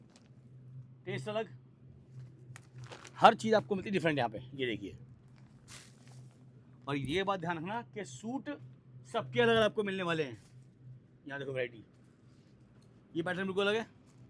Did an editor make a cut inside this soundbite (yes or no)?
no